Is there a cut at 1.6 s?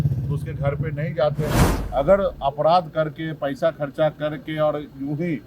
yes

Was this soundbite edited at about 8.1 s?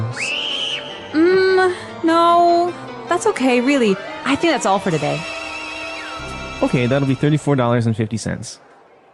no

